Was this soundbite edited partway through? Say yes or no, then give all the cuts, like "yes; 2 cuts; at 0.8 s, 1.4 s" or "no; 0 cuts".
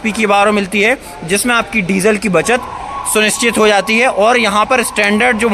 no; 0 cuts